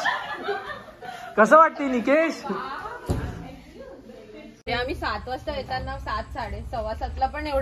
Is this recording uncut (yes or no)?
no